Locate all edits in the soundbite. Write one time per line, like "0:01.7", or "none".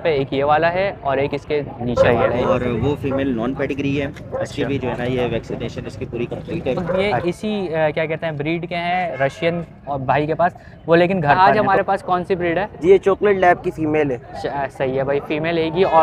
0:01.9
0:06.8
0:11.4

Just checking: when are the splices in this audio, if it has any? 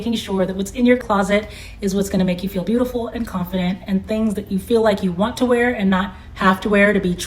none

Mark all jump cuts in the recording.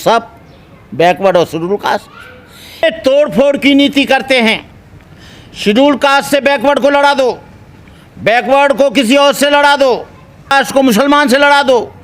0:02.8
0:10.5

